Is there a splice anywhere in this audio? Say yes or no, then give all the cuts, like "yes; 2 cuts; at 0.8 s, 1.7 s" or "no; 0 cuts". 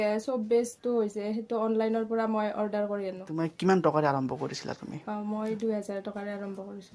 yes; 1 cut; at 3.3 s